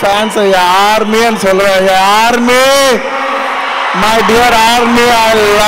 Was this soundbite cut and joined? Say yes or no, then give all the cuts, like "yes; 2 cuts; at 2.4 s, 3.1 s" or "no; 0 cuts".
no; 0 cuts